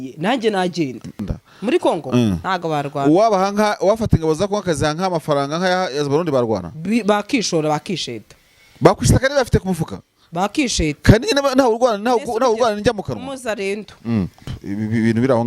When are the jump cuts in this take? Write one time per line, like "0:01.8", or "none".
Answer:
0:01.3
0:14.4